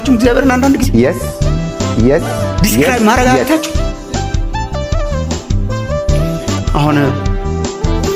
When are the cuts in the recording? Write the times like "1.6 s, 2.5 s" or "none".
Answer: none